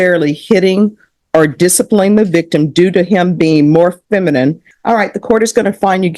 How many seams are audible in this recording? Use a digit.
1